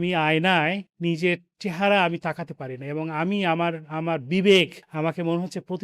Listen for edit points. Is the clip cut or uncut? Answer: cut